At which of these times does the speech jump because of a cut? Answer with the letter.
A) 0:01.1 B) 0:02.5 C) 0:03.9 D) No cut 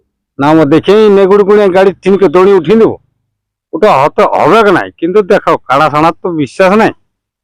D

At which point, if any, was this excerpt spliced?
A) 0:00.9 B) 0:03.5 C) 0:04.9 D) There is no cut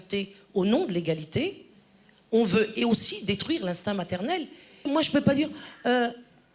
C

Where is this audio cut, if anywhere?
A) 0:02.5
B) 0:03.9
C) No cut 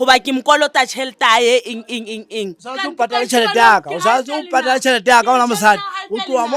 C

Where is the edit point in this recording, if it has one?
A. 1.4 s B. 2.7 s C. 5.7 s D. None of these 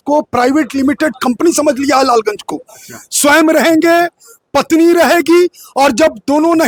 D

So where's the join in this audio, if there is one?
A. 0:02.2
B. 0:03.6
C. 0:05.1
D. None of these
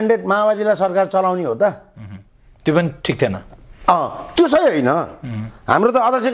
D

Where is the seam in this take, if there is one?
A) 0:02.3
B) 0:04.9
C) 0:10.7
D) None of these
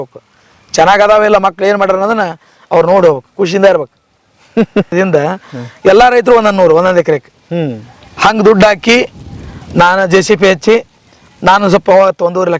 B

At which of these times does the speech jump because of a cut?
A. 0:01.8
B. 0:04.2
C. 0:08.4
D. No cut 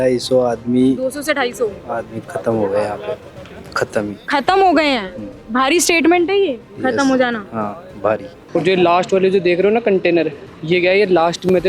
C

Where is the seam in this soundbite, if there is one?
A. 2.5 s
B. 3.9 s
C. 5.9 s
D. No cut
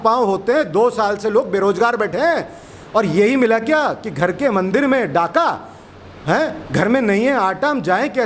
D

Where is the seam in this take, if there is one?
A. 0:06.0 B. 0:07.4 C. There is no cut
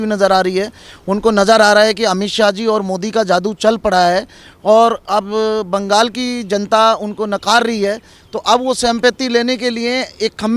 C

